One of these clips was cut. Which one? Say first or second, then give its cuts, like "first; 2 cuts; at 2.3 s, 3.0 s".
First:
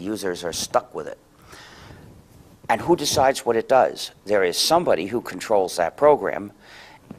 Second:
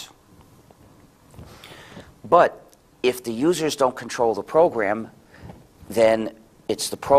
second; 1 cut; at 4.8 s